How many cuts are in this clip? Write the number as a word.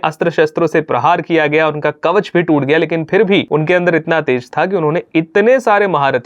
one